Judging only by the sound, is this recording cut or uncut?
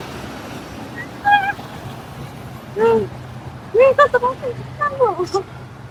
uncut